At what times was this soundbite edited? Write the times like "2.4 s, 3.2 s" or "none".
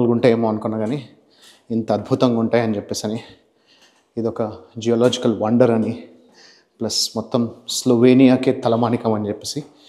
none